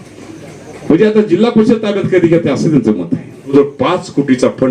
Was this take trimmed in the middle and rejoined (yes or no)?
yes